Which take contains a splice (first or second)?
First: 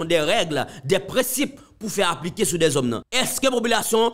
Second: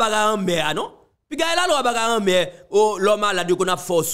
first